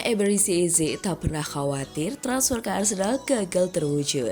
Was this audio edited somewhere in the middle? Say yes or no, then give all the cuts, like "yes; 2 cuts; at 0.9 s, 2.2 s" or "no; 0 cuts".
no; 0 cuts